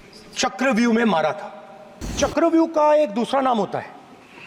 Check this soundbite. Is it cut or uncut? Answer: cut